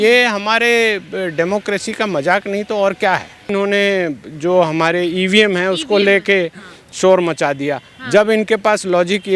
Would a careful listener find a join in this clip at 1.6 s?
no; 1 cut; at 3.5 s

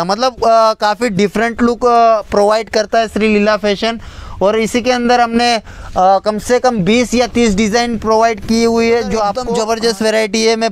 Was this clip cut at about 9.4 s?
yes; 1 cut; at 9.4 s

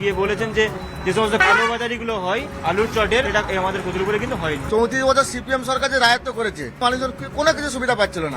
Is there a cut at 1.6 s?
no; 3 cuts; at 3.3 s, 4.6 s, 6.8 s

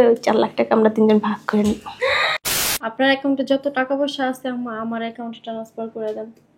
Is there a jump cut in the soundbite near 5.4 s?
no; 1 cut; at 2.4 s

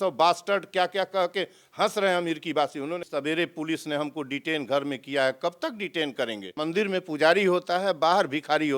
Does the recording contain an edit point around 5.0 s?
no; 2 cuts; at 3.0 s, 6.5 s

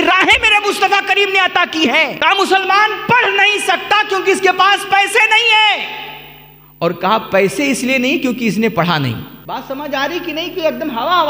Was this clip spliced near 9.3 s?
yes; 2 cuts; at 2.1 s, 9.3 s

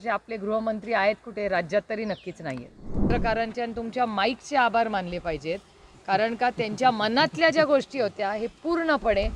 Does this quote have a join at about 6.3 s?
no; 1 cut; at 3.1 s

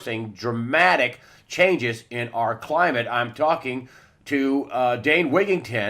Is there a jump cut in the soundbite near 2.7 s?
yes; 1 cut; at 2.7 s

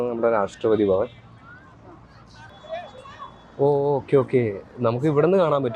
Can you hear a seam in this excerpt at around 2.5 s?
yes; 1 cut; at 2.5 s

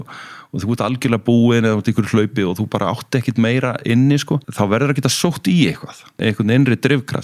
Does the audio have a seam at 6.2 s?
yes; 2 cuts; at 4.5 s, 6.2 s

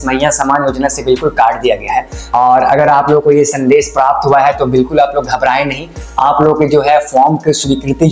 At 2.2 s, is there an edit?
yes; 1 cut; at 2.2 s

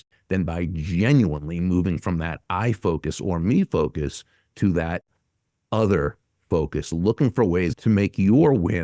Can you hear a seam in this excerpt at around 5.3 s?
no; 1 cut; at 7.7 s

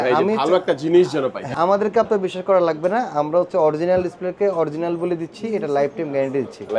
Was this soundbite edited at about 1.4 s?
yes; 1 cut; at 1.4 s

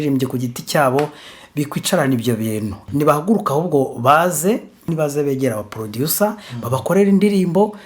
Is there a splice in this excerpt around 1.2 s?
no; 2 cuts; at 2.8 s, 4.8 s

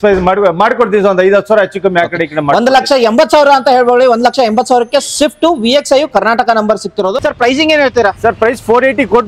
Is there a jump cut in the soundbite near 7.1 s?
yes; 1 cut; at 7.1 s

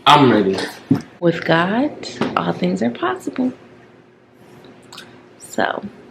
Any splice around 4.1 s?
no; 1 cut; at 1.1 s

